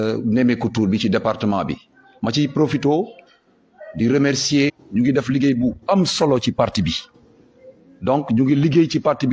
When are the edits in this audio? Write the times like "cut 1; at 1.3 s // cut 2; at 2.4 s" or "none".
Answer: cut 1; at 4.7 s